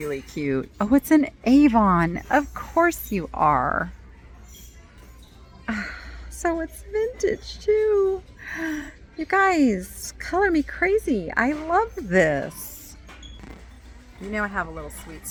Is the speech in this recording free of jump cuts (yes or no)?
yes